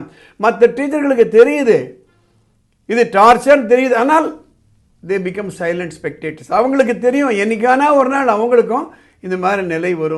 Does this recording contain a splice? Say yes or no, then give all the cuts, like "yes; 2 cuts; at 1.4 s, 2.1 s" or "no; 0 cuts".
no; 0 cuts